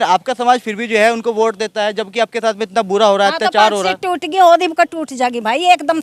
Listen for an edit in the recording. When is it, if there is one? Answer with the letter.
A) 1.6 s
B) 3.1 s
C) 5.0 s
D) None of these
D